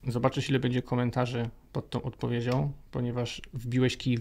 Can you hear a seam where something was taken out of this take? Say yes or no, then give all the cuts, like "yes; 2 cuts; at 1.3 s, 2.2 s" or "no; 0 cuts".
no; 0 cuts